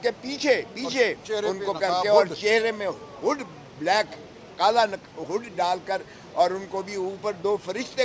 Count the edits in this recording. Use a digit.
0